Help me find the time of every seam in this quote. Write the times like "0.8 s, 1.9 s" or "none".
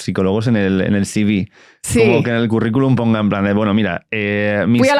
none